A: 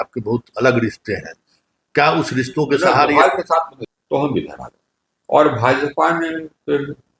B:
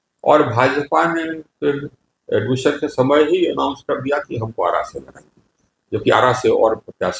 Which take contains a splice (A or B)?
A